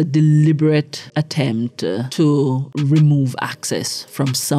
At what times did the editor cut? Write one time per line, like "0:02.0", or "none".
0:01.0
0:02.1
0:02.7